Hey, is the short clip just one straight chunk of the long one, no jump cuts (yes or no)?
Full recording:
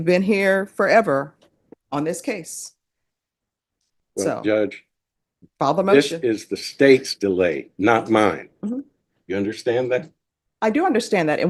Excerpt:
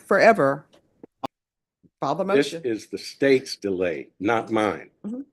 no